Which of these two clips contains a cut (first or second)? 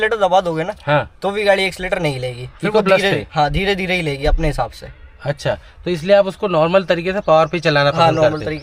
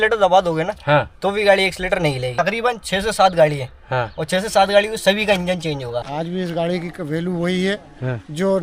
second